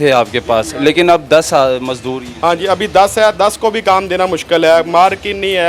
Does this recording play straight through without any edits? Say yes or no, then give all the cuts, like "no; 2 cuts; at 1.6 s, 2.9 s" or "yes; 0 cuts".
yes; 0 cuts